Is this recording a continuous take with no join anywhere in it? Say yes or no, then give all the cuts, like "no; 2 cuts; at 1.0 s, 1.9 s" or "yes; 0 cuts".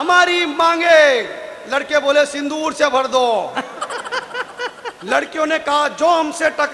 yes; 0 cuts